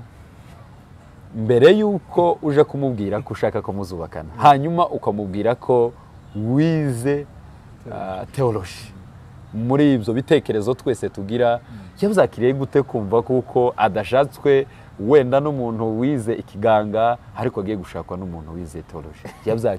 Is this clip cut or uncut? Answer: uncut